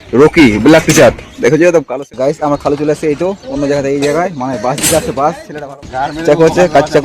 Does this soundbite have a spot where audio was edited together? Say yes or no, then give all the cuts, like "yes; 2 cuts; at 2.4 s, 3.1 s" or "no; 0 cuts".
yes; 2 cuts; at 1.8 s, 5.5 s